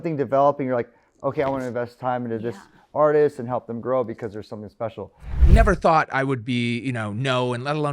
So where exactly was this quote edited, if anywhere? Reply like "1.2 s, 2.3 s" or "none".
5.4 s